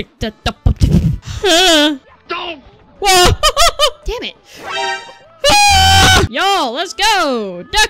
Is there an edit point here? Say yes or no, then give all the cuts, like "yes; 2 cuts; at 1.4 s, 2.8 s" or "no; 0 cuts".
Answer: no; 0 cuts